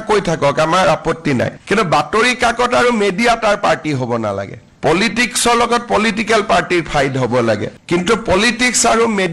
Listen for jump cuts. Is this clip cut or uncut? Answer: cut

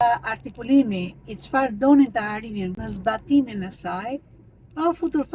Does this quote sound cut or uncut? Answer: cut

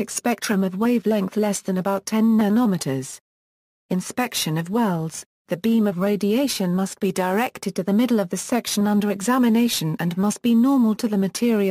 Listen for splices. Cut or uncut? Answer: cut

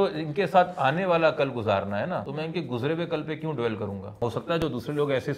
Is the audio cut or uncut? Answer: cut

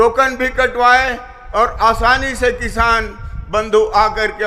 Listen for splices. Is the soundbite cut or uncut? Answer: uncut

